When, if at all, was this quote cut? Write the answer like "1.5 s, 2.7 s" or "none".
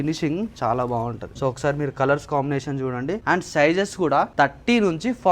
1.3 s, 3.2 s, 4.3 s